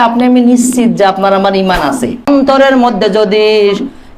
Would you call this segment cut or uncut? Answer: cut